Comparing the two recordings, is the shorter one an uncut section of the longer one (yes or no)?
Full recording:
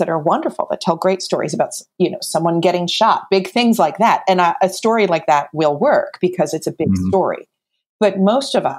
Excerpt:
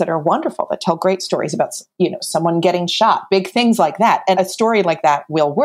no